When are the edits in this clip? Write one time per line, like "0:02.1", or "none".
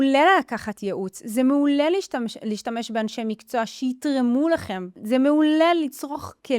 0:04.9